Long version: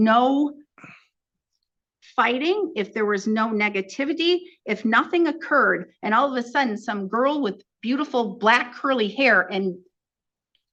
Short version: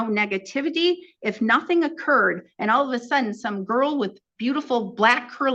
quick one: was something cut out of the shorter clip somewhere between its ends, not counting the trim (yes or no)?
no